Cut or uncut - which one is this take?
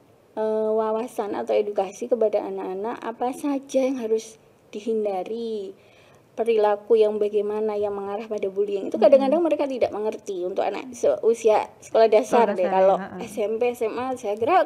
uncut